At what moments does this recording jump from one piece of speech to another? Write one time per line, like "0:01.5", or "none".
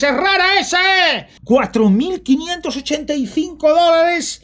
0:01.3